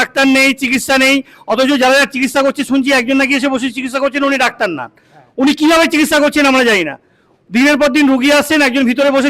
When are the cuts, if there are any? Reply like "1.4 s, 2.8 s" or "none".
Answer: none